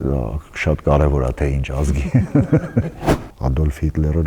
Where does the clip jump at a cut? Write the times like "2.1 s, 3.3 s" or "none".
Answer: 3.0 s